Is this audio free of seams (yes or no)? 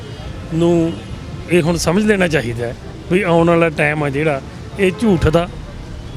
yes